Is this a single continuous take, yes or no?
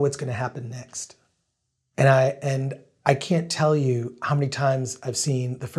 yes